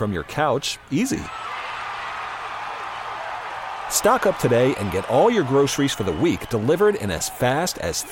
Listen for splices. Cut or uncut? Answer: uncut